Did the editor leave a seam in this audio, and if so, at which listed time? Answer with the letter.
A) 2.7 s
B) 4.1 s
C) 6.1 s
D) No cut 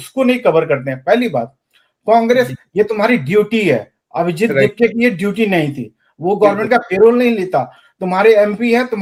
D